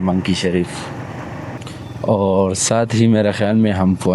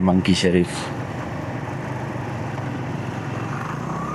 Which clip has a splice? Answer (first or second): first